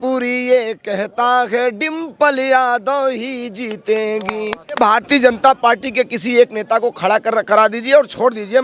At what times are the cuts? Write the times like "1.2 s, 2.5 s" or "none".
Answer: 4.8 s